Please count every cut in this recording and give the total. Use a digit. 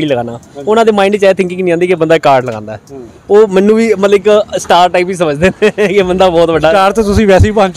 0